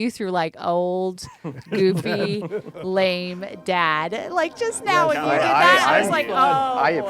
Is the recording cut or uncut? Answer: uncut